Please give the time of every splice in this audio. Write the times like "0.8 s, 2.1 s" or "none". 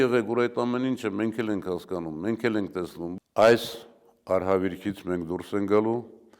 3.1 s

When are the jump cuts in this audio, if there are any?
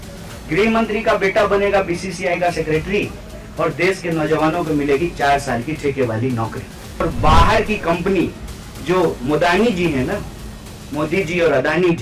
7.0 s

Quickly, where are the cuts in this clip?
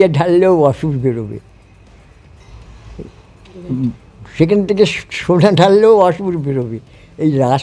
none

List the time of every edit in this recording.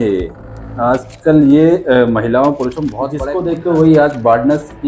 3.1 s

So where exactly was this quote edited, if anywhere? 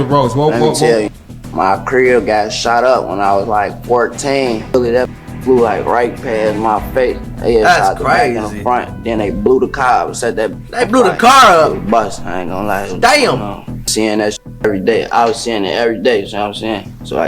4.7 s, 13.8 s

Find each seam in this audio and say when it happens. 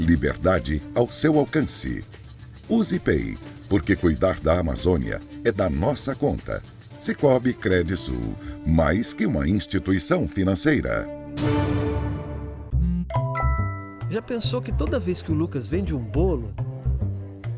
12.6 s

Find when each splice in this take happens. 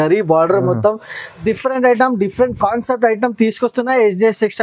1.4 s

